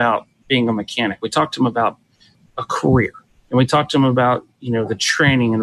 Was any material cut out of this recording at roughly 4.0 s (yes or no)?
no